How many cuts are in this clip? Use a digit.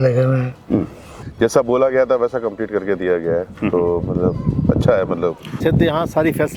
2